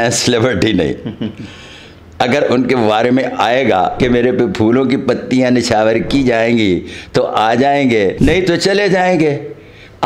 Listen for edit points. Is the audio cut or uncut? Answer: cut